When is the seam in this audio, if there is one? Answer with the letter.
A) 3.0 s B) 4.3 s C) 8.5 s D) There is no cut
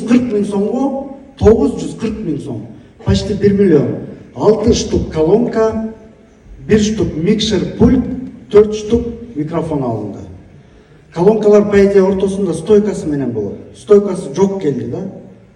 D